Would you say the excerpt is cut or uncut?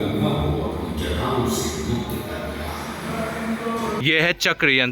cut